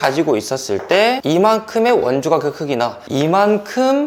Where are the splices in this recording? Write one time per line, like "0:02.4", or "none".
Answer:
0:01.2
0:03.1